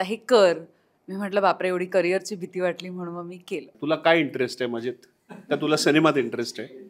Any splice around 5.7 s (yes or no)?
no